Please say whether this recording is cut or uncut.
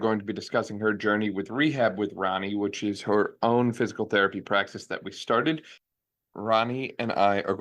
cut